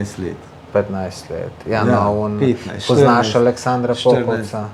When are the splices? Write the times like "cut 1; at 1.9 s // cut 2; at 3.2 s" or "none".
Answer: none